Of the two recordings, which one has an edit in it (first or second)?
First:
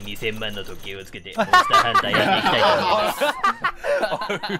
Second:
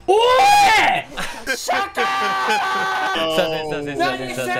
second